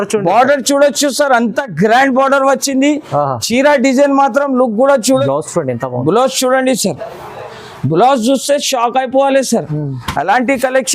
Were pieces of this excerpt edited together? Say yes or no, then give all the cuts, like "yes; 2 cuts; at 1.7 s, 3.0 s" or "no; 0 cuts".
yes; 1 cut; at 5.2 s